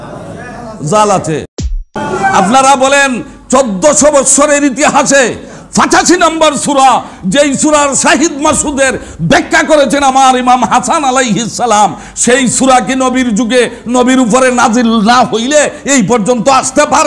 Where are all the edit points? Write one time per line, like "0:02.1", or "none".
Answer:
0:01.8